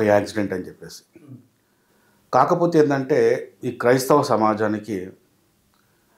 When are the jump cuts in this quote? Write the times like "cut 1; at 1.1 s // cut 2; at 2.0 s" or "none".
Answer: none